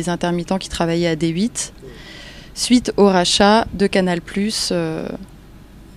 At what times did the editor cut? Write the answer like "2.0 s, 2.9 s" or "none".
1.7 s